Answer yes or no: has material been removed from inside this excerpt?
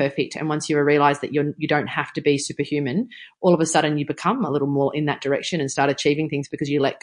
no